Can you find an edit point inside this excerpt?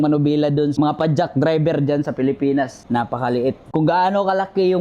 yes; 3 cuts; at 0.7 s, 2.8 s, 3.6 s

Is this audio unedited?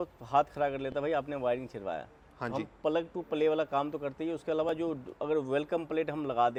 yes; 0 cuts

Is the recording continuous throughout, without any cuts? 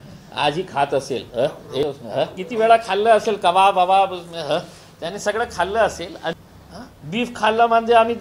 no; 2 cuts; at 1.8 s, 6.2 s

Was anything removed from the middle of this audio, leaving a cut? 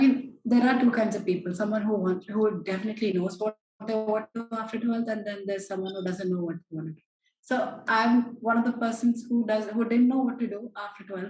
no; 0 cuts

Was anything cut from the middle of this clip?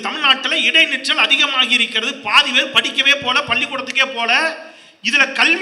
no; 0 cuts

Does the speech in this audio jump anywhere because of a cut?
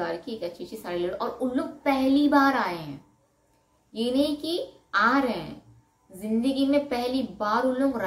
no; 0 cuts

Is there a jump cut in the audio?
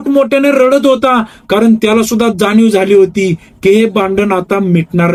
no; 0 cuts

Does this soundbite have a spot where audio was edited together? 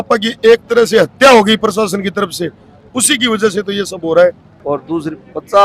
yes; 1 cut; at 4.5 s

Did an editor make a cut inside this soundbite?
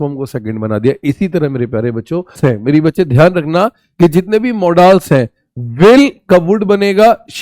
yes; 1 cut; at 2.4 s

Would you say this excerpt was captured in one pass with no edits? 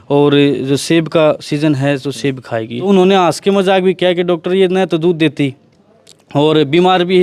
no; 1 cut; at 2.9 s

